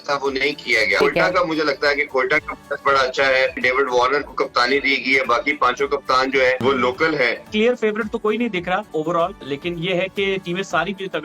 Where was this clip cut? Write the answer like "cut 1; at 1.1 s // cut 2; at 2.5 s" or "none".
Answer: cut 1; at 1.0 s // cut 2; at 3.6 s // cut 3; at 6.6 s // cut 4; at 7.5 s // cut 5; at 9.2 s